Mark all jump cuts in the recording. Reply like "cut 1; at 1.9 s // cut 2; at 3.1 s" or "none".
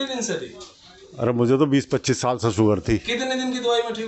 none